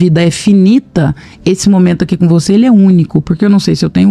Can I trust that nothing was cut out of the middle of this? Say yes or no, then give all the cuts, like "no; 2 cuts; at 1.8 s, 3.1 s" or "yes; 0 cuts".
yes; 0 cuts